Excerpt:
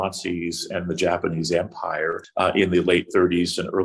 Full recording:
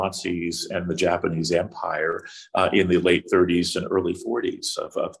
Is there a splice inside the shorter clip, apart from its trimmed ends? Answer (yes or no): yes